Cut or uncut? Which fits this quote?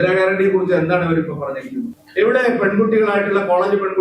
cut